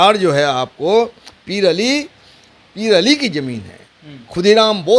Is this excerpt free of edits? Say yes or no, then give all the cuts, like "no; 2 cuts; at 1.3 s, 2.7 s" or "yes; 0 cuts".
yes; 0 cuts